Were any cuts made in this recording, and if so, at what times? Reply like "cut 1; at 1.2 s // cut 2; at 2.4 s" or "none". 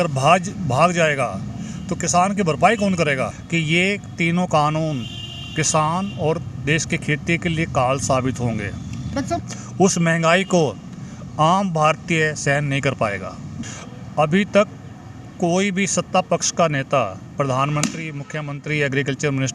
cut 1; at 3.4 s // cut 2; at 9.4 s // cut 3; at 13.5 s